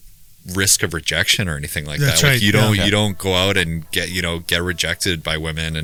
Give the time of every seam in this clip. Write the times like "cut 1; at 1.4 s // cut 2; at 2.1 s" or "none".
none